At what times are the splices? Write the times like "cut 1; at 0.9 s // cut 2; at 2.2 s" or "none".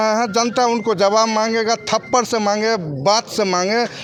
none